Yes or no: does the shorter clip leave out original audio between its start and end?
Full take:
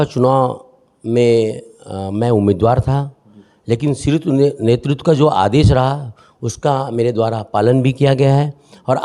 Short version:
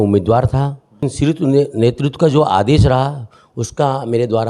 yes